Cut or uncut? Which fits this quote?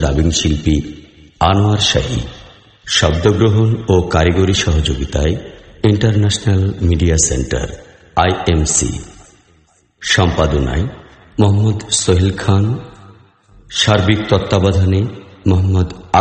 uncut